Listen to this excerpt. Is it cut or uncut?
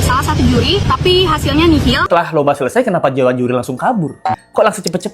cut